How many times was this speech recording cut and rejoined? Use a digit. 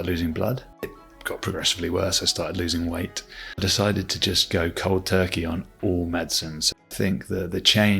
3